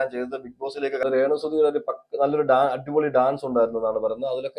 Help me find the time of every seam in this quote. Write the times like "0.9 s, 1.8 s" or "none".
1.0 s